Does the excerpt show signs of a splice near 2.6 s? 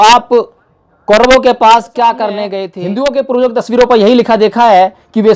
yes; 1 cut; at 2.6 s

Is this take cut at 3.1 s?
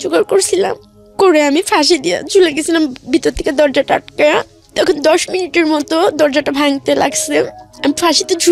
no; 0 cuts

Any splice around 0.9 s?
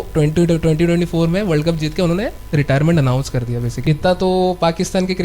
no; 1 cut; at 3.7 s

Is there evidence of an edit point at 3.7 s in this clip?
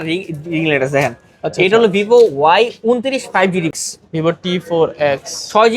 yes; 1 cut; at 3.7 s

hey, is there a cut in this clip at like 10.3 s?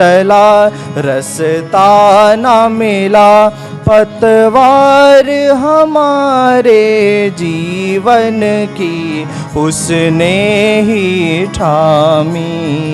no; 0 cuts

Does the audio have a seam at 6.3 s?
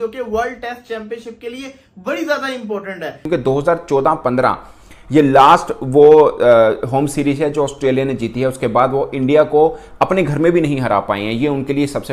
no; 1 cut; at 3.3 s

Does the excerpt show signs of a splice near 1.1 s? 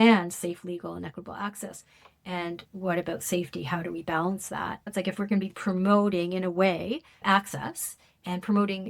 no; 1 cut; at 4.9 s

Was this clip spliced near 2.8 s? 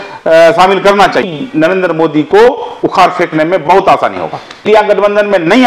no; 2 cuts; at 1.3 s, 4.6 s

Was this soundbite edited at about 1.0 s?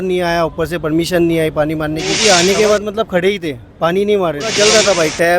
no; 2 cuts; at 2.2 s, 4.5 s

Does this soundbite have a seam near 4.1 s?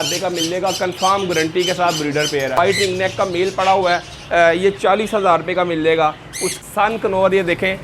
no; 2 cuts; at 2.6 s, 6.6 s

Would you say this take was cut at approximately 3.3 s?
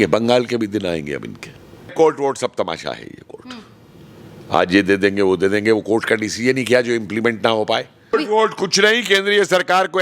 no; 2 cuts; at 1.9 s, 8.1 s

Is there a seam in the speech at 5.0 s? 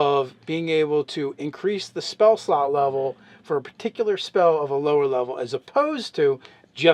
no; 1 cut; at 1.1 s

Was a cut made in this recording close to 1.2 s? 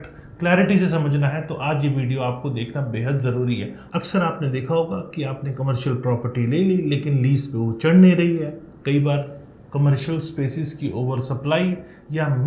no; 1 cut; at 3.8 s

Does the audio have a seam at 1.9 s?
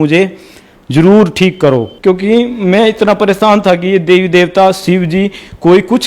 yes; 1 cut; at 1.9 s

